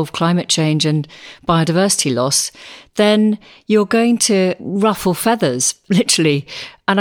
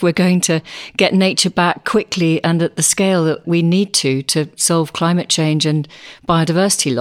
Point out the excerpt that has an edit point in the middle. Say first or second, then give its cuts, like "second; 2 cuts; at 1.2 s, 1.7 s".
second; 1 cut; at 3.4 s